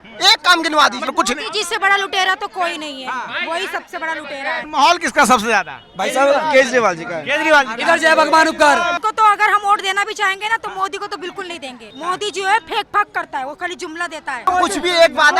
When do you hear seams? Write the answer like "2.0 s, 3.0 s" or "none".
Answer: 1.1 s, 4.6 s, 9.0 s, 11.9 s, 14.4 s